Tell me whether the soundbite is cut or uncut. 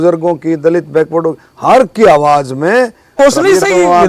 cut